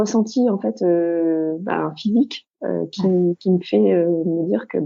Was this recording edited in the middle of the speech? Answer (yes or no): no